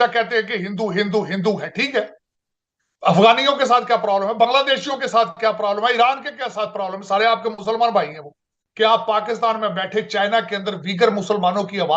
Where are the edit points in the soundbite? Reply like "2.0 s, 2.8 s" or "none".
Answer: 8.6 s